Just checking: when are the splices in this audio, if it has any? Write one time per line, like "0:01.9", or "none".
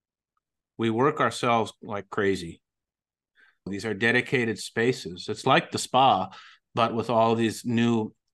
0:03.7